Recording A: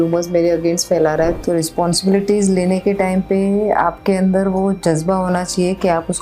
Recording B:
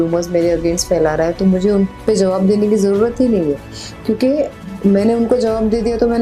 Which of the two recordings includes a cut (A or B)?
A